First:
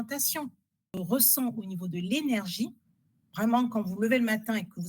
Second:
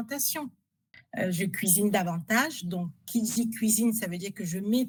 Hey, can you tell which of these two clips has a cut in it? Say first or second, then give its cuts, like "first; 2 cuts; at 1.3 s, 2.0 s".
first; 1 cut; at 0.9 s